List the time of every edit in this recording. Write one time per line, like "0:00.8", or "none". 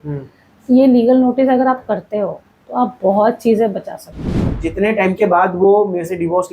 0:04.6